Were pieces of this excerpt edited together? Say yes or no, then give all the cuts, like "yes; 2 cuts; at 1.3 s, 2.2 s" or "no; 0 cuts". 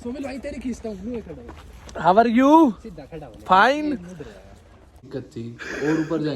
yes; 1 cut; at 5.1 s